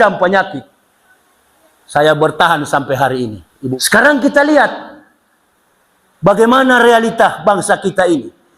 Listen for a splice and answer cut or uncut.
cut